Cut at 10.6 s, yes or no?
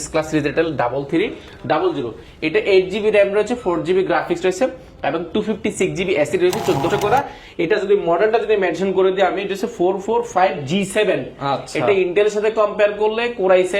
no